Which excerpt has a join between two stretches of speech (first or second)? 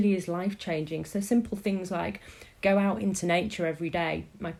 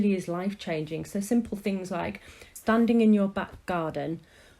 second